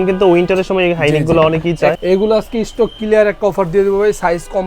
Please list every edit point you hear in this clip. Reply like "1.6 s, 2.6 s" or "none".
2.0 s